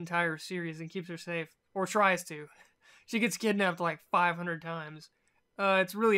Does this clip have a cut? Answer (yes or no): yes